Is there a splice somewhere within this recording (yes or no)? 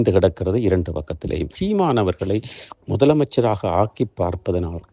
yes